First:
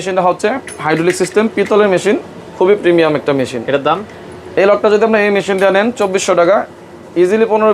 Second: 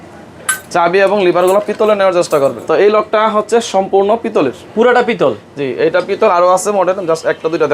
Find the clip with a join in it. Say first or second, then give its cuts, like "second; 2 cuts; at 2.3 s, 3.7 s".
second; 1 cut; at 2.6 s